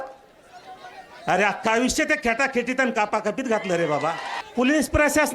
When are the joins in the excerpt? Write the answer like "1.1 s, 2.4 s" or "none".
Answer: 4.3 s